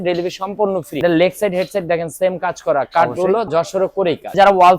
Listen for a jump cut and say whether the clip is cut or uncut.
cut